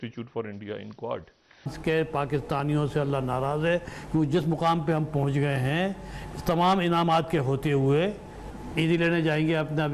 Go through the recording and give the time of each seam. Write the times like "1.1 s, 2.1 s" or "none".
1.8 s, 8.5 s